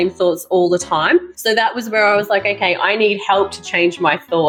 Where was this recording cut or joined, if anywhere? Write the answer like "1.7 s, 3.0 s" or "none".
none